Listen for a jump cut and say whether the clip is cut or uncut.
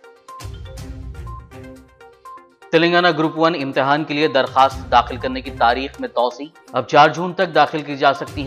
uncut